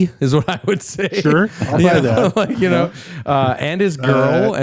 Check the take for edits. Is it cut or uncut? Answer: uncut